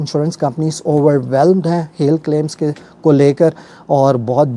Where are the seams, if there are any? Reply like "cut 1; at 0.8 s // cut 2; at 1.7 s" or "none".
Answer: none